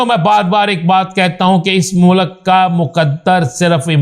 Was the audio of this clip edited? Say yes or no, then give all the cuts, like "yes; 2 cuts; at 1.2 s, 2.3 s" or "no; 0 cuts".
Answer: no; 0 cuts